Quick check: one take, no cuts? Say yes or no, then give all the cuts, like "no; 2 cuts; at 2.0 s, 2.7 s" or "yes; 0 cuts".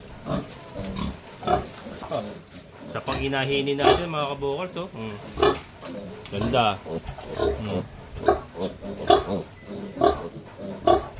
no; 1 cut; at 2.0 s